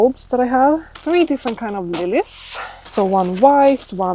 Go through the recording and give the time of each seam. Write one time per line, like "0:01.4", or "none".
0:00.9
0:02.9